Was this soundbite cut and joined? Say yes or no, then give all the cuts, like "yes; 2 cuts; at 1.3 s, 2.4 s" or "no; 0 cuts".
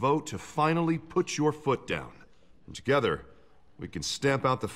no; 0 cuts